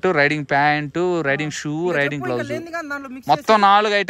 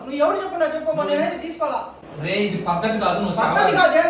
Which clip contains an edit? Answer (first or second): second